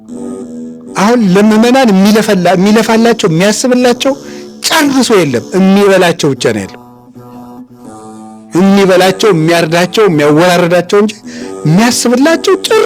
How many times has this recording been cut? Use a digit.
1